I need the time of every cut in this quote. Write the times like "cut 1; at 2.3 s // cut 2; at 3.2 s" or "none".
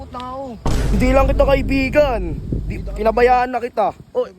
cut 1; at 0.9 s